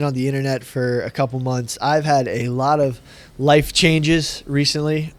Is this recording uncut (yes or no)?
yes